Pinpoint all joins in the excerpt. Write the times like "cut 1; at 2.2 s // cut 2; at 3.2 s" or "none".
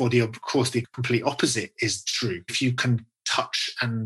cut 1; at 0.9 s // cut 2; at 2.5 s